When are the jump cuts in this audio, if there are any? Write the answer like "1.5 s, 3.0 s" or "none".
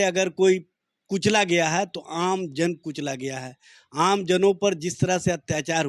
none